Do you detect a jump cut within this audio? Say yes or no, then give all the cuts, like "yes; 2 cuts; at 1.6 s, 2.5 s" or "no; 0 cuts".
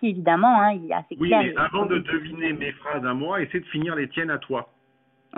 no; 0 cuts